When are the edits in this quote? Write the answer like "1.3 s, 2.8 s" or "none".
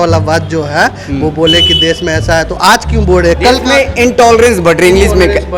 none

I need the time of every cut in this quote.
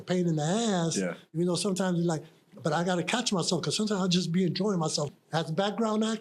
5.1 s

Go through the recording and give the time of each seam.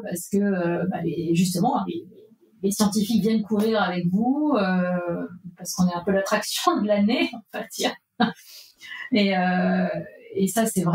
none

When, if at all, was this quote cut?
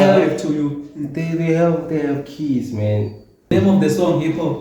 3.5 s

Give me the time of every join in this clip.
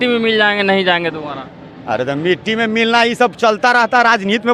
none

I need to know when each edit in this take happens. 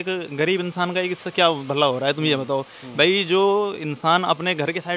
none

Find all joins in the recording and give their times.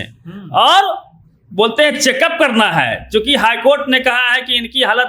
none

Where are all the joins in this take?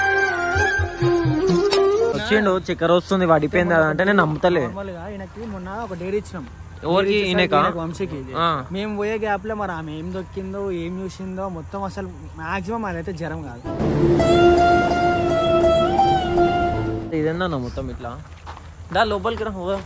2.2 s, 17.1 s

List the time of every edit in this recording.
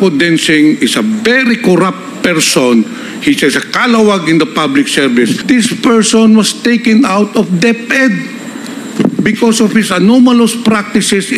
5.4 s

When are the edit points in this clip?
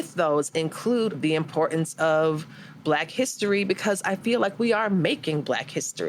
1.1 s

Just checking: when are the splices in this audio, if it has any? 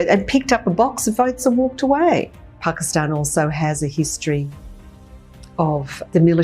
2.3 s

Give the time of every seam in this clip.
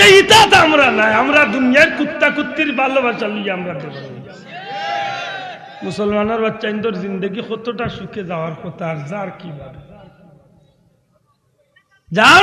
none

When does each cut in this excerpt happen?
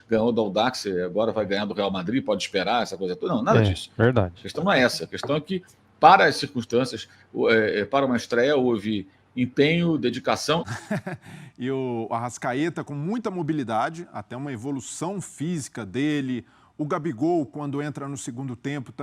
10.7 s

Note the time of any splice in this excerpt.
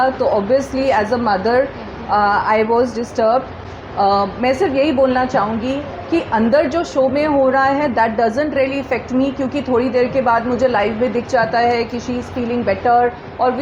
none

